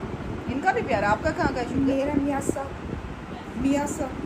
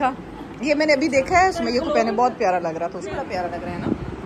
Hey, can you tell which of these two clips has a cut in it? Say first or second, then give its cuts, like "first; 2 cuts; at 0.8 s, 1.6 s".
second; 1 cut; at 3.0 s